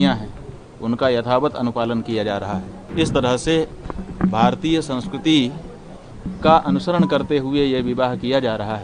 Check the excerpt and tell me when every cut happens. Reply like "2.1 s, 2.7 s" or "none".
2.8 s